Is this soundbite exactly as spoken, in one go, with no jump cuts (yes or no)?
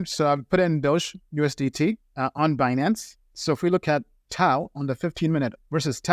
no